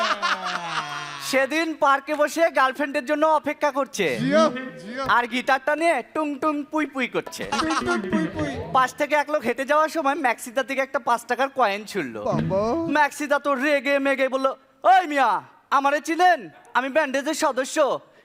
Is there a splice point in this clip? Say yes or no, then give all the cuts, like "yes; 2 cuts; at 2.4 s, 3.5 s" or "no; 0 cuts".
no; 0 cuts